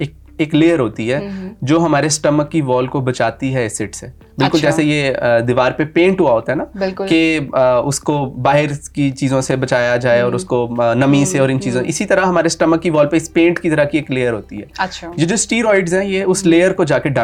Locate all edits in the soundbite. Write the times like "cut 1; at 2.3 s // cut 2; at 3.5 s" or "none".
none